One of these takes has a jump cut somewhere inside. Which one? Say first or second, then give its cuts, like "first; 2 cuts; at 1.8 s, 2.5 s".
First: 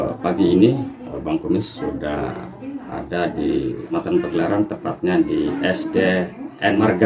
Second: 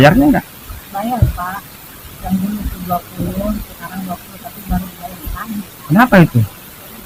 first; 1 cut; at 4.0 s